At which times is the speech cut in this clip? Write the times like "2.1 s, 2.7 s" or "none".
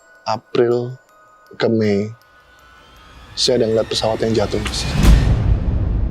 none